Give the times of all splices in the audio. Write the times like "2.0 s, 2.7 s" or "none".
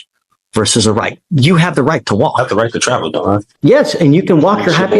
3.5 s